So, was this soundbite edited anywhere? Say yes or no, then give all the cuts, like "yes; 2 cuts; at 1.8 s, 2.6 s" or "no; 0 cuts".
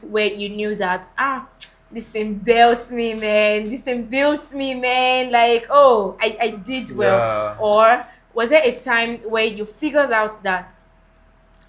no; 0 cuts